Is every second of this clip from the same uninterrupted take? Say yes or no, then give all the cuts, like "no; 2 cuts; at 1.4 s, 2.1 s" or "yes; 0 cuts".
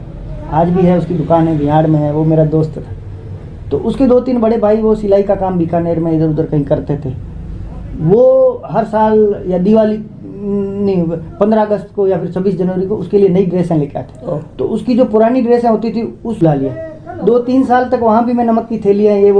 no; 1 cut; at 16.4 s